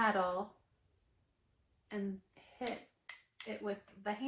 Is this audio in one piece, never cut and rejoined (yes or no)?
yes